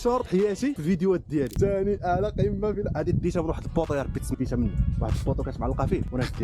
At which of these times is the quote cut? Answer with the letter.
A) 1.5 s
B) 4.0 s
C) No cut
A